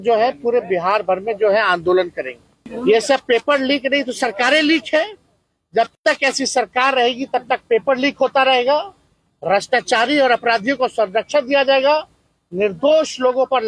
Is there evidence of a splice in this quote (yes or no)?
yes